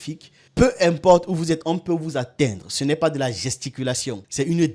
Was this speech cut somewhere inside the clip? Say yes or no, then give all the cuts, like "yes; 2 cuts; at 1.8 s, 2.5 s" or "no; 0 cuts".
no; 0 cuts